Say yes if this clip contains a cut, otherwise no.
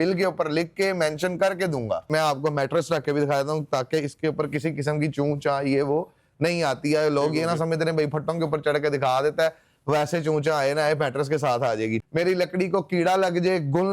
yes